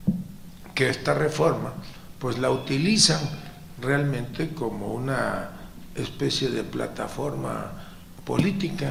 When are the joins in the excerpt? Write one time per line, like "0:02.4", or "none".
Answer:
none